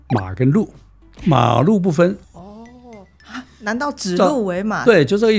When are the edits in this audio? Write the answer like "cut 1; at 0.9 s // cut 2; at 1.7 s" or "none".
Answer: cut 1; at 2.2 s